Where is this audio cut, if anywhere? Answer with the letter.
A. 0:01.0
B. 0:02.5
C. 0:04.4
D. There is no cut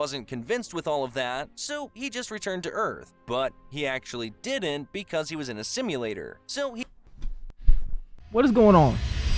D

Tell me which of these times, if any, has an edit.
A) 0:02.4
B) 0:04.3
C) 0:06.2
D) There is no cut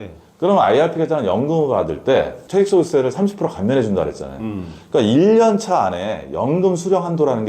A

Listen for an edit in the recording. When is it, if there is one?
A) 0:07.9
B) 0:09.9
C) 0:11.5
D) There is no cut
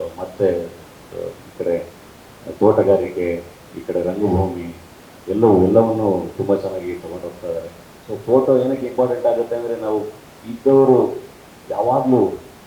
A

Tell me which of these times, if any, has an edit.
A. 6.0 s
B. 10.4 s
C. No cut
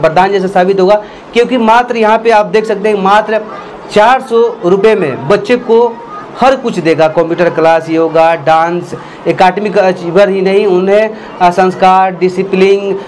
C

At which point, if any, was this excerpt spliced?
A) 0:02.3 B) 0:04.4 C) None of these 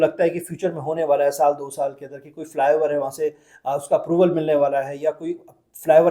C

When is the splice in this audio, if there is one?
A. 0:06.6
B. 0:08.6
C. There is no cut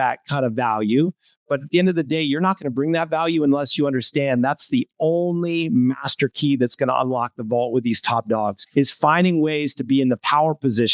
B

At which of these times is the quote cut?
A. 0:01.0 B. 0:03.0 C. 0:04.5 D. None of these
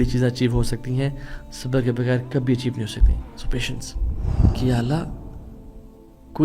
C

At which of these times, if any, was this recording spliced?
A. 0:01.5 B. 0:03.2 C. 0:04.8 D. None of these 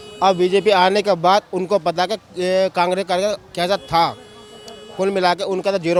D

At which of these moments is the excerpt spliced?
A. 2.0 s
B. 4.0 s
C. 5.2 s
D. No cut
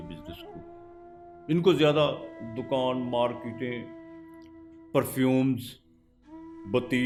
D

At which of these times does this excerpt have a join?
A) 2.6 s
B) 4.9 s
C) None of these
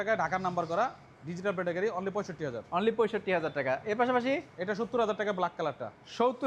C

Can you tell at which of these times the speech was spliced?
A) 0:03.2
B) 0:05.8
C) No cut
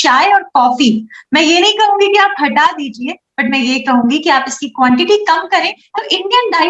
B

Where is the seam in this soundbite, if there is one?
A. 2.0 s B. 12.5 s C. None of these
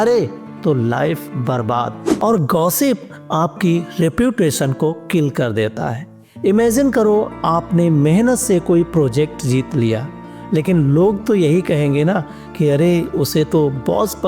A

